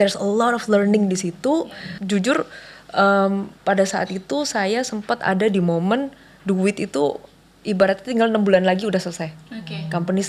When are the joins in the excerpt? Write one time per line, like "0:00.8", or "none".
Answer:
0:01.9